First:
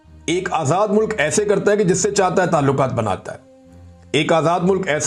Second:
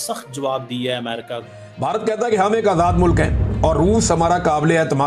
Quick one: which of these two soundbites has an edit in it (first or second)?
second